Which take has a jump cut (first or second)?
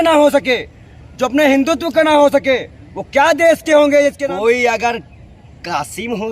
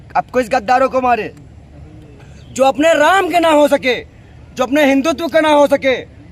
first